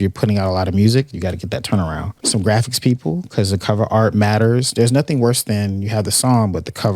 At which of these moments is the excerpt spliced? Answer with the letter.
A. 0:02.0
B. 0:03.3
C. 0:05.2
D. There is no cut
B